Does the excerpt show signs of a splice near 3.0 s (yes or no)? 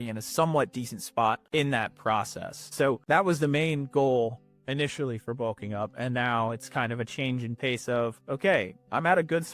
yes